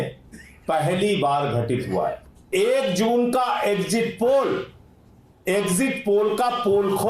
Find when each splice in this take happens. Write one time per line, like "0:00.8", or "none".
0:02.5